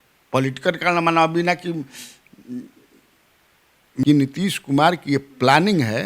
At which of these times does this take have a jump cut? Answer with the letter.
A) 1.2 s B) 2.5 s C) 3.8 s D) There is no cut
C